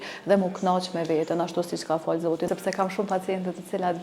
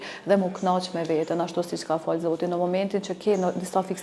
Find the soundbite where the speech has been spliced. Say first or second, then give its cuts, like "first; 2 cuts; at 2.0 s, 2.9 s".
first; 1 cut; at 2.5 s